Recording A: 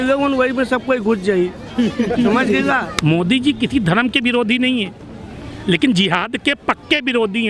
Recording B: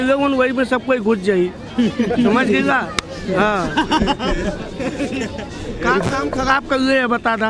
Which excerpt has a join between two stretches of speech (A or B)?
A